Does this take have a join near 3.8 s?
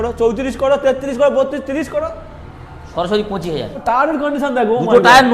yes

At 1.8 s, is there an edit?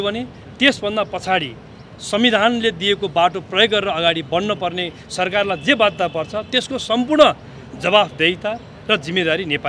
no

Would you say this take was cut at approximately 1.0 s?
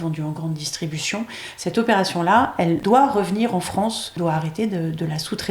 no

